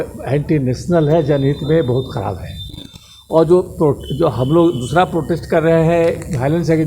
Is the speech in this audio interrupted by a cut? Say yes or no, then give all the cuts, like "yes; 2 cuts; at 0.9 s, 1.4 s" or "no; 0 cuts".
no; 0 cuts